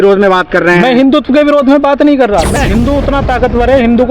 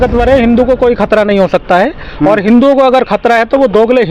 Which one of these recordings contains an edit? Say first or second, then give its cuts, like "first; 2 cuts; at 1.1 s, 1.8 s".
first; 1 cut; at 2.5 s